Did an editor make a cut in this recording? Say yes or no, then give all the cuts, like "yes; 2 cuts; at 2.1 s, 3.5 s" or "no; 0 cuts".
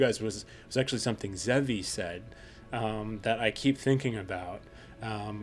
no; 0 cuts